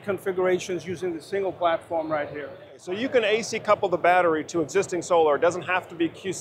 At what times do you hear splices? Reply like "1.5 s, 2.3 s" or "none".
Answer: 2.9 s